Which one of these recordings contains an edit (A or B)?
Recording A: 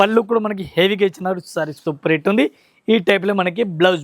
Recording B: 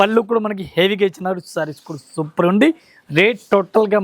A